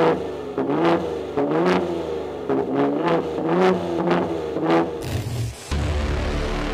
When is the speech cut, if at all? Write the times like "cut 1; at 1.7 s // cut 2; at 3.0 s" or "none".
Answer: cut 1; at 5.1 s

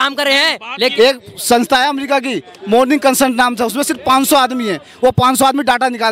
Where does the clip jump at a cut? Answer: cut 1; at 0.9 s

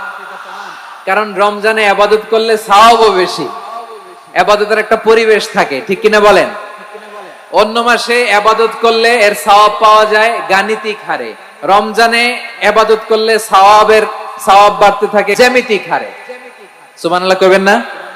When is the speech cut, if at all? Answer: cut 1; at 15.4 s

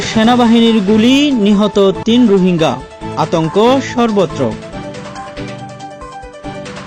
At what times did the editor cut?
none

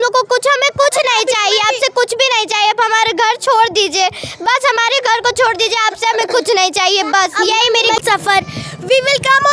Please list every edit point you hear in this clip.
cut 1; at 8.0 s

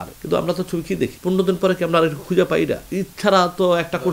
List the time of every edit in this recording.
cut 1; at 1.2 s // cut 2; at 2.9 s

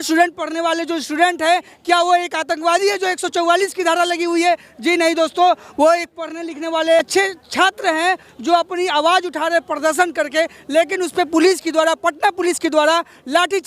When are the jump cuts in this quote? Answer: cut 1; at 7.0 s

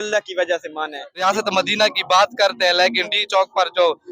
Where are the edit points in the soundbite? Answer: cut 1; at 1.2 s

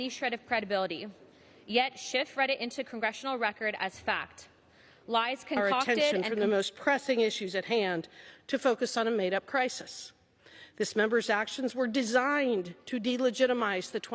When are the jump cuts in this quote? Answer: cut 1; at 6.1 s

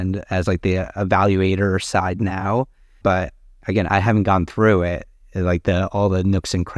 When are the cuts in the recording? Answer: none

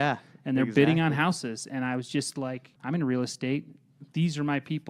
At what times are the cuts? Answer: cut 1; at 2.7 s

